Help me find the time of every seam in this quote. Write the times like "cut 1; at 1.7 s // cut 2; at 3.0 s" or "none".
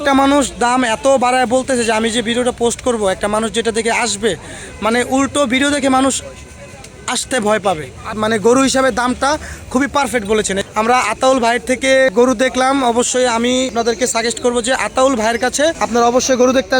cut 1; at 8.2 s // cut 2; at 10.6 s // cut 3; at 12.1 s // cut 4; at 13.7 s // cut 5; at 15.8 s